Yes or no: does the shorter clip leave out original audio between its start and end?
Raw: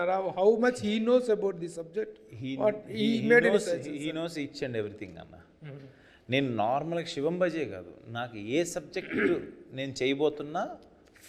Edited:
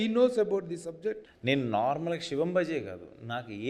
yes